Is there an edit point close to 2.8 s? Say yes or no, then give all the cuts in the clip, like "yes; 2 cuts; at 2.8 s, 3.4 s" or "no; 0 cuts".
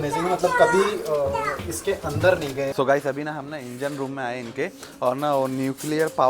yes; 1 cut; at 2.8 s